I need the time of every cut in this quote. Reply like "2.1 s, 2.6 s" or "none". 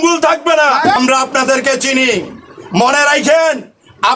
1.0 s

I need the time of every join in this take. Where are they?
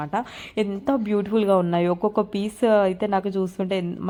none

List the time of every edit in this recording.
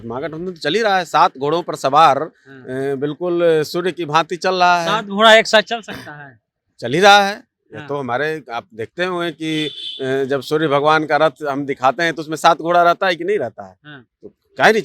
none

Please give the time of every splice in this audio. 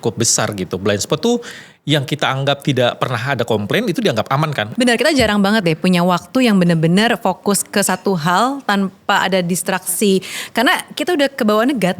4.6 s

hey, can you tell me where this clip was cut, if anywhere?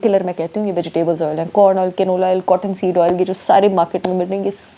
none

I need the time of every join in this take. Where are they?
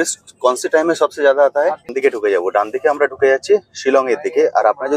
1.9 s

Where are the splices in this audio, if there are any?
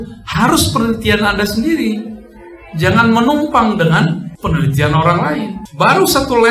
4.3 s, 5.6 s

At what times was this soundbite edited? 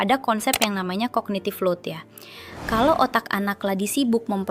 none

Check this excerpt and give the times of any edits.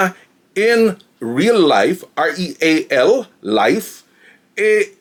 none

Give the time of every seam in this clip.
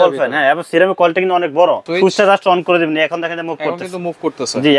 1.8 s

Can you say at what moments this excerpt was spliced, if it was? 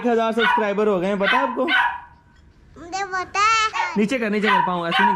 3.7 s

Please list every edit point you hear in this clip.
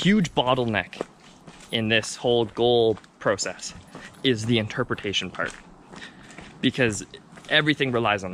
none

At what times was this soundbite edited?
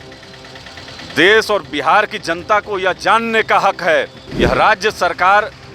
4.2 s

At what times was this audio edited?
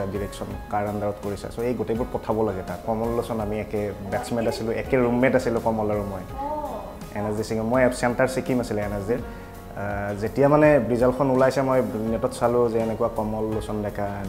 2.8 s

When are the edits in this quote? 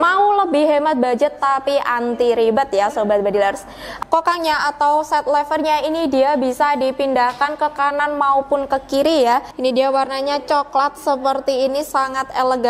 3.8 s, 9.5 s

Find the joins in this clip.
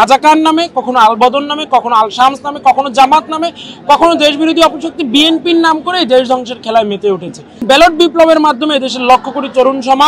7.6 s

